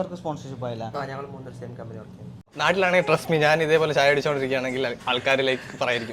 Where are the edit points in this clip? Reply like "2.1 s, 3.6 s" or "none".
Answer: 2.5 s